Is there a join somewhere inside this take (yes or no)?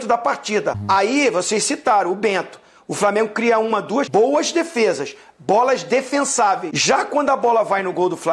yes